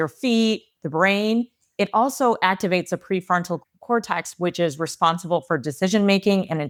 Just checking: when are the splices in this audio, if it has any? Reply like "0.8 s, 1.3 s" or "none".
none